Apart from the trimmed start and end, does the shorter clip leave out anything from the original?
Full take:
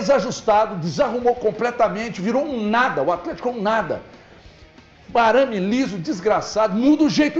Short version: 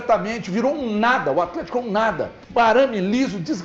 yes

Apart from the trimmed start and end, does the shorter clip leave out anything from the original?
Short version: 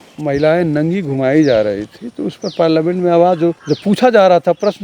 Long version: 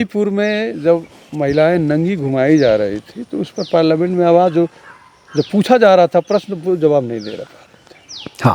yes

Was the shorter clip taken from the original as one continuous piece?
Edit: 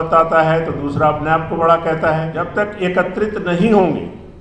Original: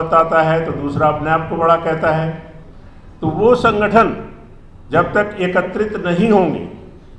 no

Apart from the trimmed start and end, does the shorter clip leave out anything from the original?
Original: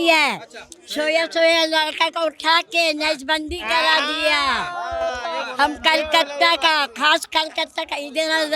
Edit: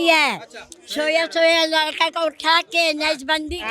no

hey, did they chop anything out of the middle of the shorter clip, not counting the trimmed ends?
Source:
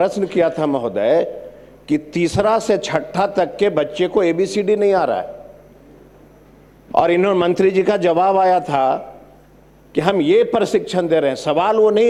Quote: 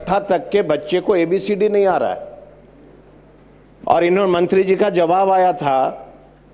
no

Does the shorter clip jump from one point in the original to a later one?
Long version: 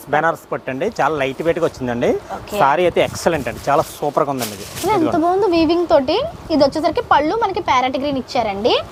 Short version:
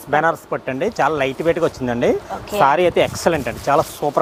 no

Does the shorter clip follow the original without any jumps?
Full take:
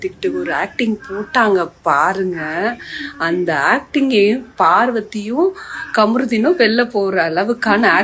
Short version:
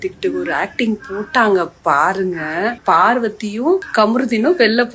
no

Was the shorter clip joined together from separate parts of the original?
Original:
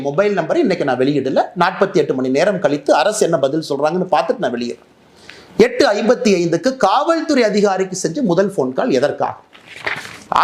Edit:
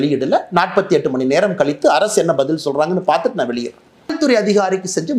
yes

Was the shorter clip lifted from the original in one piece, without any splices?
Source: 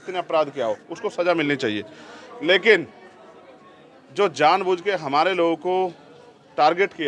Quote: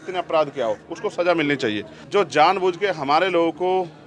no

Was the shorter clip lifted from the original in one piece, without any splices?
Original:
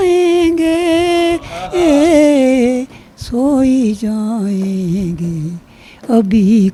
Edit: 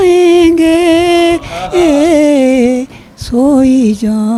yes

